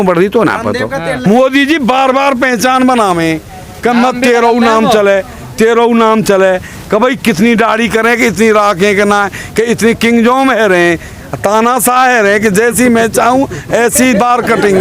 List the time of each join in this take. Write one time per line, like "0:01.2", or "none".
0:01.2